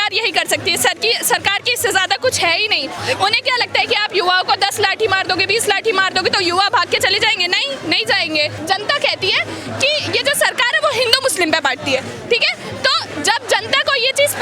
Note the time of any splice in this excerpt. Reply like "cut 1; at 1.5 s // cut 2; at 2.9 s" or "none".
cut 1; at 2.9 s // cut 2; at 8.6 s